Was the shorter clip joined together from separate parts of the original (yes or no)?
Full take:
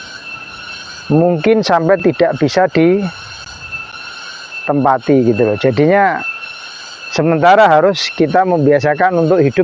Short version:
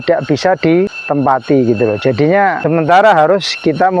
yes